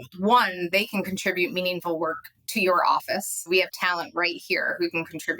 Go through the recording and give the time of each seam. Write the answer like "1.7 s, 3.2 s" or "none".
3.5 s